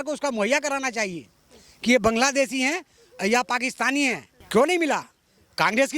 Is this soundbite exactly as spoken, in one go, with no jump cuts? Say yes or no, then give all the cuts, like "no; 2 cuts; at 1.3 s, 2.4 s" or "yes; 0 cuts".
no; 1 cut; at 4.3 s